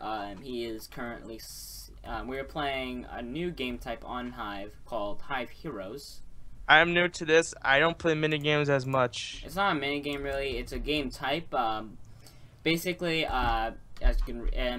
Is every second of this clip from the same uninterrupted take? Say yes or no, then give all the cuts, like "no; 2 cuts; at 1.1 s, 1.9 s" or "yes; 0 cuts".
yes; 0 cuts